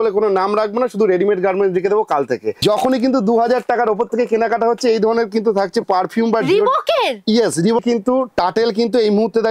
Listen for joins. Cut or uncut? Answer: cut